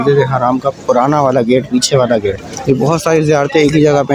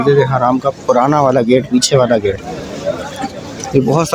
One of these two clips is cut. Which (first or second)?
first